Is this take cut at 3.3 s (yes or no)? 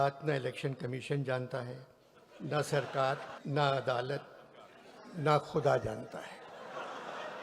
yes